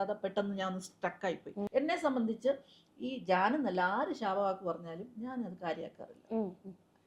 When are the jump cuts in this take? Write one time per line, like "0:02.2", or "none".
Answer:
0:01.7